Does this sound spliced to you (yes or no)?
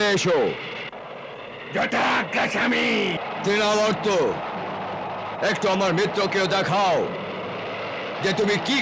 yes